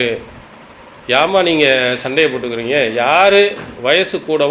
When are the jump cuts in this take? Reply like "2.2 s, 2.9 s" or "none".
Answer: none